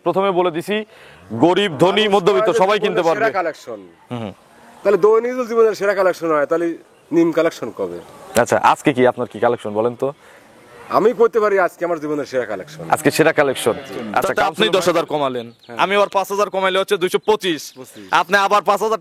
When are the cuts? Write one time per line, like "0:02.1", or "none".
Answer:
0:14.4